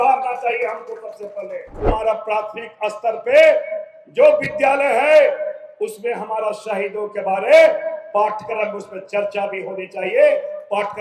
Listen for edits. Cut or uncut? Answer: cut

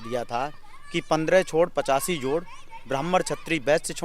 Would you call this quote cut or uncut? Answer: uncut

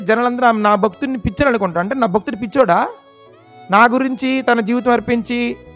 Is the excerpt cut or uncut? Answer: uncut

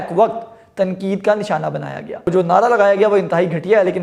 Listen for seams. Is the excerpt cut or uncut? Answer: cut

